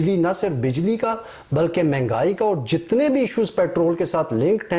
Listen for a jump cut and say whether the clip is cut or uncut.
uncut